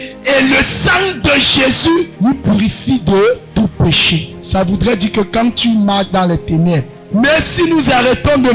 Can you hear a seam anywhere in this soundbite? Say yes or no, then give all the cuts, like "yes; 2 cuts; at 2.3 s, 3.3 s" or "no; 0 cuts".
yes; 4 cuts; at 2.1 s, 3.4 s, 4.4 s, 6.9 s